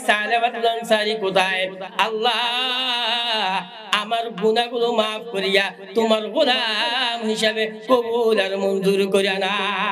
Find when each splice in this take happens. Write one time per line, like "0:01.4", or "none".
0:01.8